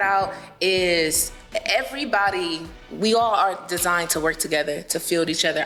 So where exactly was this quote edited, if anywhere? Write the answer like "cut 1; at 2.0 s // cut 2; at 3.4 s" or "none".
none

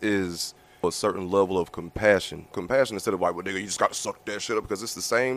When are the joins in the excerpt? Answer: cut 1; at 0.8 s // cut 2; at 2.6 s

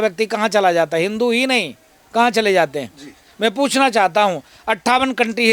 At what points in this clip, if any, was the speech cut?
none

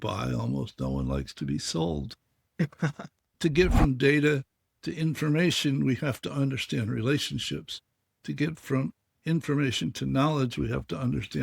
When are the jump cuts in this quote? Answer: cut 1; at 3.3 s

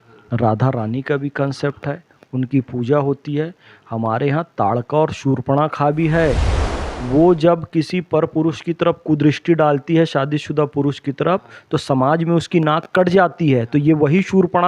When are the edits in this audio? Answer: none

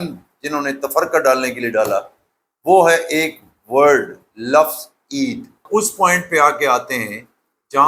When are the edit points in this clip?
cut 1; at 5.6 s

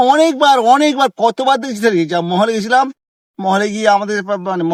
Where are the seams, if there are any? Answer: none

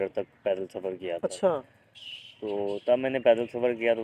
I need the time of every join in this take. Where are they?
none

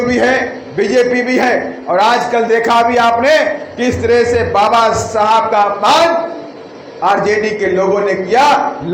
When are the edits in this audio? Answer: none

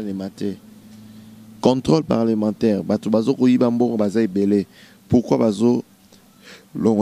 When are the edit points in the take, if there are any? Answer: none

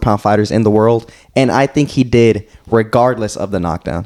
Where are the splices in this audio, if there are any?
none

